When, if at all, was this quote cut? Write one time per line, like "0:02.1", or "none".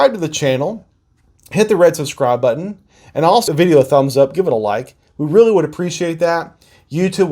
0:03.4

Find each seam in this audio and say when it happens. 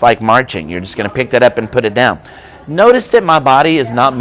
none

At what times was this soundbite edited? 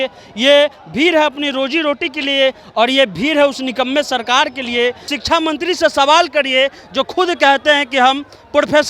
0:05.1

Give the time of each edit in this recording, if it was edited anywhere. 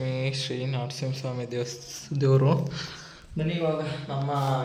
none

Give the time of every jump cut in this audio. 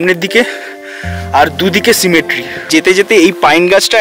0:02.7

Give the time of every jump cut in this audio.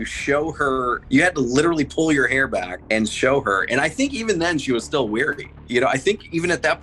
0:01.0
0:02.8
0:05.5

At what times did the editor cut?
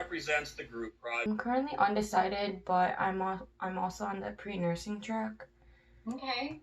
0:01.3

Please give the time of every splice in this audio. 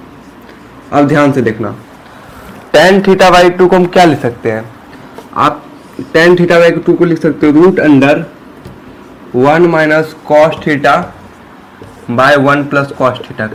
none

